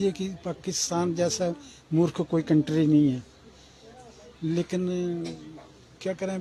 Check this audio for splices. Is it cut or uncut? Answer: uncut